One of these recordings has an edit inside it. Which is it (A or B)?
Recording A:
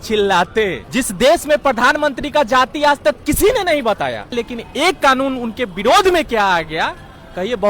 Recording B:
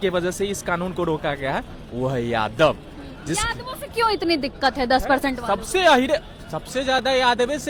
A